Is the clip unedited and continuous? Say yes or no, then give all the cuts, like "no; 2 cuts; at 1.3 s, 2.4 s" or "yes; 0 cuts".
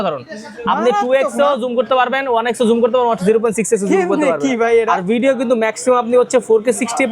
yes; 0 cuts